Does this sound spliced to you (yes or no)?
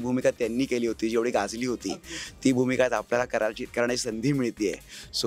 no